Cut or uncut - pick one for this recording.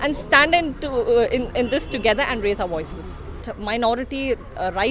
cut